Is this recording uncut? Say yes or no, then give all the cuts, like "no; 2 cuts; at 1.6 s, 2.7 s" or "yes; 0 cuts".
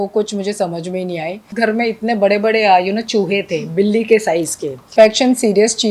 no; 2 cuts; at 1.5 s, 4.9 s